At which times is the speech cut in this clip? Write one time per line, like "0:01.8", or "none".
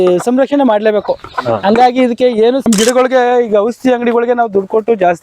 0:02.7